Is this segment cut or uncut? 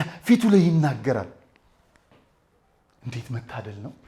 uncut